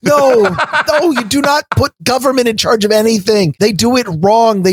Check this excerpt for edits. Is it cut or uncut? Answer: cut